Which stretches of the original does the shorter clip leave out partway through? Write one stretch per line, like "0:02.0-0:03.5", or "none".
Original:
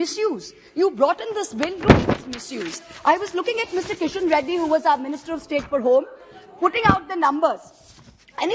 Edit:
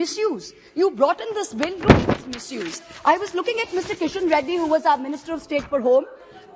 none